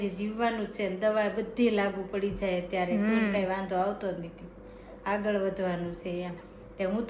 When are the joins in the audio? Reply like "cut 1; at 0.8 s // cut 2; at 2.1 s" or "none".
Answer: none